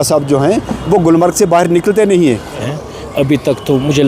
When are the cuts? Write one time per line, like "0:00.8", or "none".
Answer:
0:02.5

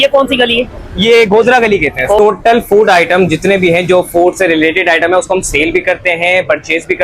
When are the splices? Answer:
0:02.2

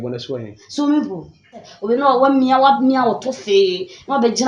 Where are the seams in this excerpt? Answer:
0:01.7

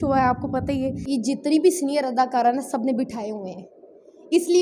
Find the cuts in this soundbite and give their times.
0:01.0

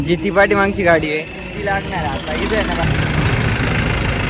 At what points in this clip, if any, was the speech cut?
0:02.8

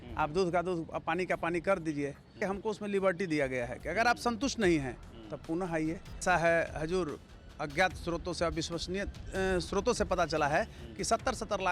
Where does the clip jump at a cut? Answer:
0:02.4
0:06.2

